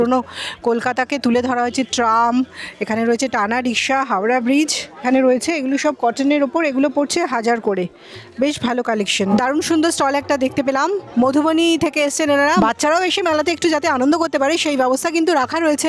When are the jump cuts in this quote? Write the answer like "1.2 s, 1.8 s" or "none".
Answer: 5.0 s, 9.3 s, 12.5 s